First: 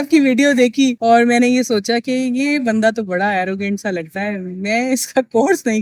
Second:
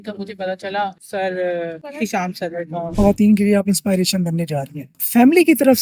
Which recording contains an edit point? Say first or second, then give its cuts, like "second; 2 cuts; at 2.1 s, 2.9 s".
second; 2 cuts; at 2.9 s, 5.0 s